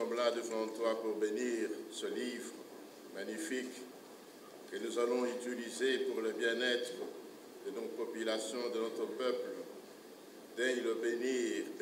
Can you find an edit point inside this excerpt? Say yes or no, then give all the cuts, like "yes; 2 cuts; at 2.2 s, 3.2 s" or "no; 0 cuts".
no; 0 cuts